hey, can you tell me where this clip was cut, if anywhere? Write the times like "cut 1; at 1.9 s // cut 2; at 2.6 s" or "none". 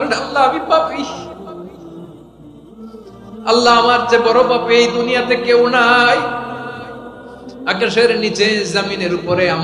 cut 1; at 1.2 s // cut 2; at 3.5 s